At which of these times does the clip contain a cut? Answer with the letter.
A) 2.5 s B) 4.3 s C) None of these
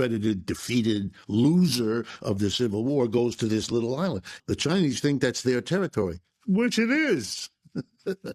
B